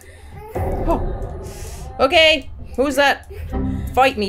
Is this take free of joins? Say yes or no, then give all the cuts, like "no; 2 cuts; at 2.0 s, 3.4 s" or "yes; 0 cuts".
yes; 0 cuts